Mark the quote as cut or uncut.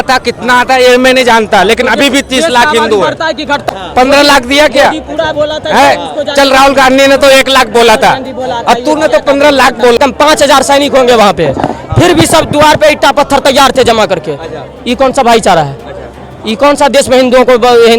cut